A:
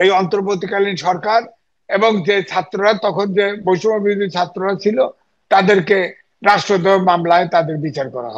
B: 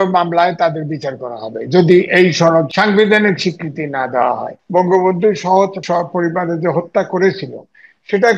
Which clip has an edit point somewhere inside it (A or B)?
B